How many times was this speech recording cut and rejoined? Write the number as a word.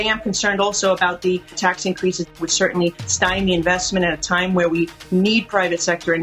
zero